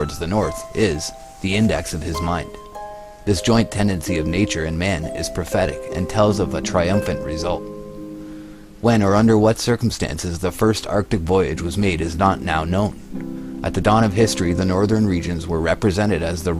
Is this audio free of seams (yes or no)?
no